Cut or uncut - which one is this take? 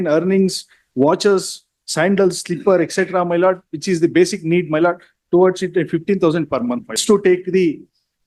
cut